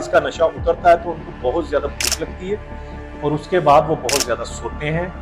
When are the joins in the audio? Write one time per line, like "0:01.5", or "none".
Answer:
none